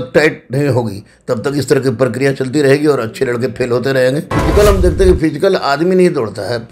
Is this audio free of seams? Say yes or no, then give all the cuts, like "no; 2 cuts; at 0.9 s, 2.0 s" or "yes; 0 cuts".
no; 1 cut; at 4.3 s